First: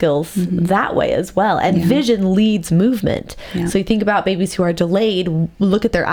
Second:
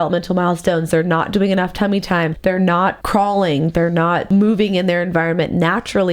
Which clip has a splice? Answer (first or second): second